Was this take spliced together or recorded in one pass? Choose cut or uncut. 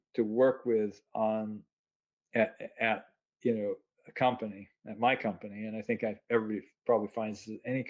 uncut